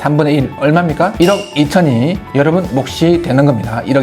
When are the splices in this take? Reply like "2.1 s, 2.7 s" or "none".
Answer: 1.1 s